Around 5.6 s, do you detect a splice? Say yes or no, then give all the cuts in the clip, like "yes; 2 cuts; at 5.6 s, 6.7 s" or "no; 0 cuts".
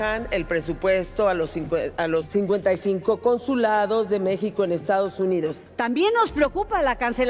yes; 2 cuts; at 2.3 s, 5.6 s